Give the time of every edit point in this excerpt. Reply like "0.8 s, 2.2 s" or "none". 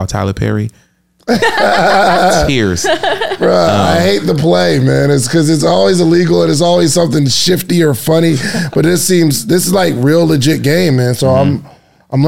none